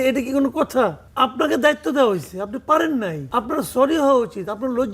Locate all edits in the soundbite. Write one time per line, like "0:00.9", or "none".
0:01.0
0:03.2